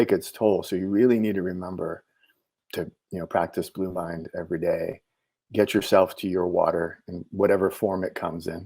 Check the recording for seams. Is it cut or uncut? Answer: cut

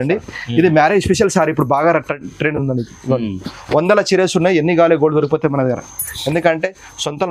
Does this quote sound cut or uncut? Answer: uncut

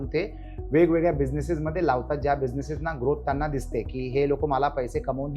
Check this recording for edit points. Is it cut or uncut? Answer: uncut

